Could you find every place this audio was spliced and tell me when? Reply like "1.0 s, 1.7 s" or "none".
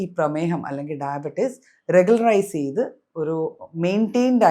none